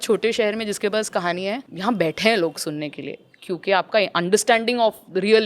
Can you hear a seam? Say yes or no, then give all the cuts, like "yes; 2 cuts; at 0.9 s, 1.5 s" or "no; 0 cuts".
yes; 1 cut; at 1.7 s